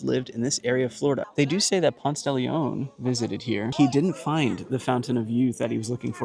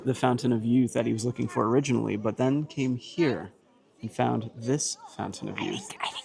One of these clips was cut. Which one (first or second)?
first